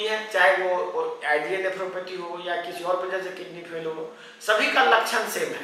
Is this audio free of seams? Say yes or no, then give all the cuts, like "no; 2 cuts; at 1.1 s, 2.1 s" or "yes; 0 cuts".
yes; 0 cuts